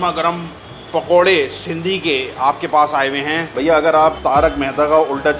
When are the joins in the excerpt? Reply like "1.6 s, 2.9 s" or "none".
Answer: 3.5 s

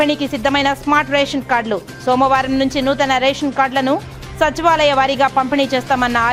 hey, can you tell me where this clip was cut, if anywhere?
none

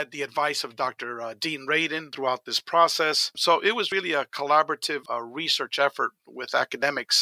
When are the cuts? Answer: 2.1 s, 3.4 s, 5.0 s

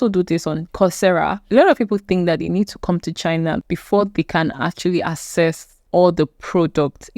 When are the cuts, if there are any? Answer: 1.4 s, 3.6 s, 5.7 s

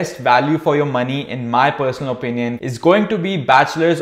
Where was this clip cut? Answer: none

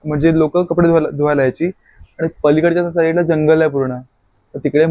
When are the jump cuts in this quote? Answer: none

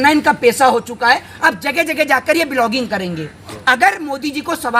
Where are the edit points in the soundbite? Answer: 3.6 s

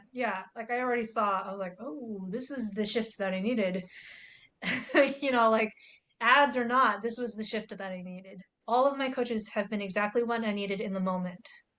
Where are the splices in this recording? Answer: 8.5 s

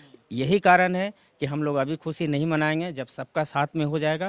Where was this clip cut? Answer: none

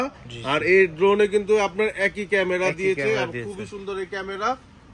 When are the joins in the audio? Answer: none

